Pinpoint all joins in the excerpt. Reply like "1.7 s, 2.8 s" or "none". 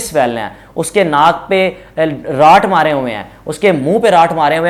none